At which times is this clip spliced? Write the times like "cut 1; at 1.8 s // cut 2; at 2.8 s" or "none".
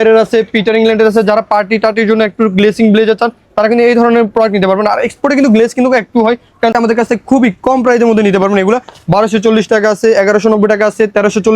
cut 1; at 6.7 s